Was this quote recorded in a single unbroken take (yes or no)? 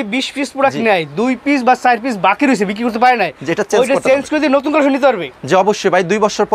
yes